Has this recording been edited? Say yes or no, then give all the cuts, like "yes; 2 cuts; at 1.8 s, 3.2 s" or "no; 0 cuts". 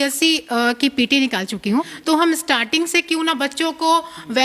yes; 1 cut; at 1.9 s